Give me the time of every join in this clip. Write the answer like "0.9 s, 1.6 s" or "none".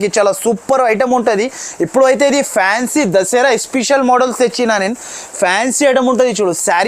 none